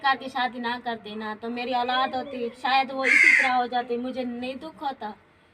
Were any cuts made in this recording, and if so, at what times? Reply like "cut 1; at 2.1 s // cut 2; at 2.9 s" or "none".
none